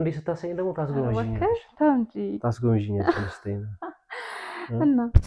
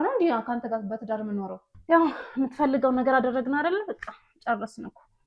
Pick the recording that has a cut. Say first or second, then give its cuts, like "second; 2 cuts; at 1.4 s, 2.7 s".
second; 1 cut; at 1.7 s